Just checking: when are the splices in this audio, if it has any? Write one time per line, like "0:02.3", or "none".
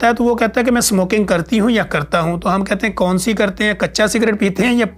none